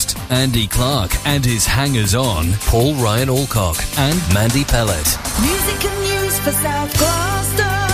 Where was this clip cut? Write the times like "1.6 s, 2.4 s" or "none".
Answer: none